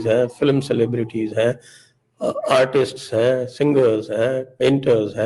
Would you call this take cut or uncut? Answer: uncut